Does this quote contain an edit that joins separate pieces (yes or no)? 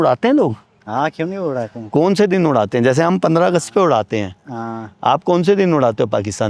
no